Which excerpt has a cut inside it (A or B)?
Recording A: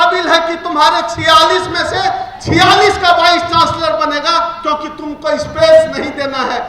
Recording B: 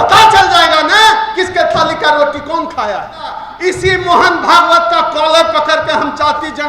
B